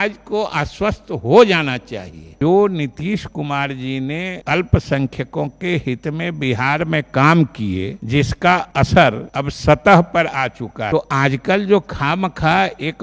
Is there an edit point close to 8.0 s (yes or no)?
yes